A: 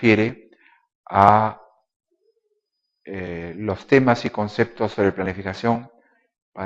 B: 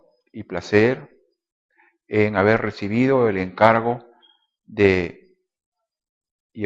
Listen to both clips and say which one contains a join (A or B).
A